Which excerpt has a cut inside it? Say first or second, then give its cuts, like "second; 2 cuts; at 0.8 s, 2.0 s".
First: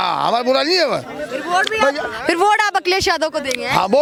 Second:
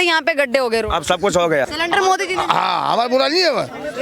second; 1 cut; at 1.7 s